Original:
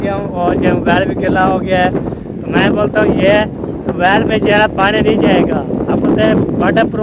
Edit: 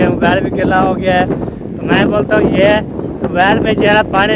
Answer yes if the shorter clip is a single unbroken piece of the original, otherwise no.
yes